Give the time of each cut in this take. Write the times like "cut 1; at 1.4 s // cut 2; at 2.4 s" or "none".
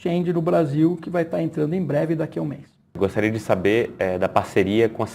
cut 1; at 3.0 s